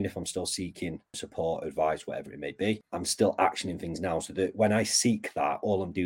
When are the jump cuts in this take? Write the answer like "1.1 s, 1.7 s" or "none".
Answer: 1.2 s, 2.9 s